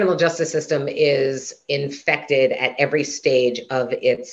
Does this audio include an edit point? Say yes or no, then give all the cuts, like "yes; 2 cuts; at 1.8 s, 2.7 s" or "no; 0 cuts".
no; 0 cuts